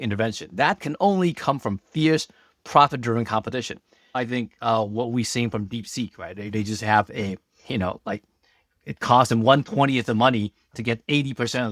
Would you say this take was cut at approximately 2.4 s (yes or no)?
no